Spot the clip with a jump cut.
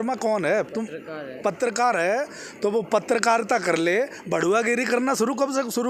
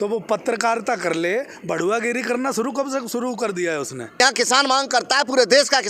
second; 1 cut; at 4.2 s

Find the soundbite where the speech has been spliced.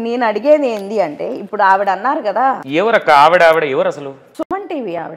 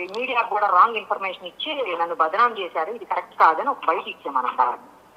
first; 2 cuts; at 2.6 s, 4.3 s

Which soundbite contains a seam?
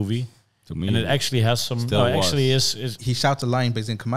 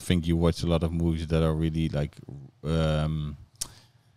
first; 1 cut; at 3.0 s

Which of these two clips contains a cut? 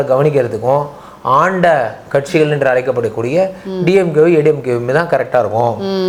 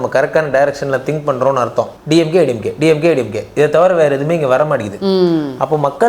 second; 1 cut; at 2.0 s

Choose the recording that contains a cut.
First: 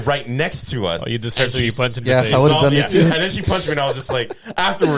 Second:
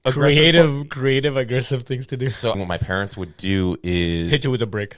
second; 1 cut; at 2.5 s

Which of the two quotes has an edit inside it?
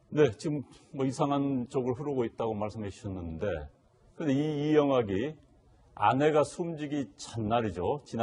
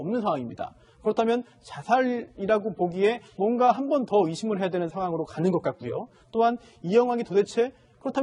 second; 1 cut; at 1.5 s

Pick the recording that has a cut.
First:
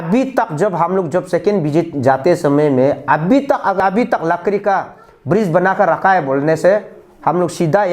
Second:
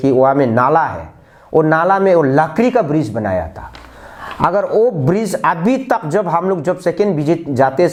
first; 1 cut; at 3.8 s

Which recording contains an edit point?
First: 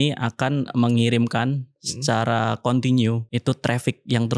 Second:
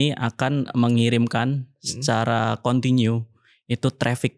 first; 1 cut; at 3.2 s

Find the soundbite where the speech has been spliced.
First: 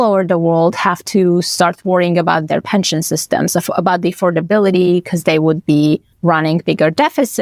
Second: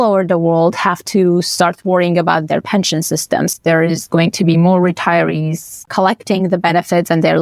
second; 2 cuts; at 3.5 s, 5.8 s

